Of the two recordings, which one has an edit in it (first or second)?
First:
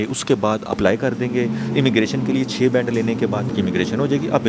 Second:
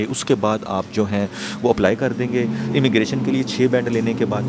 first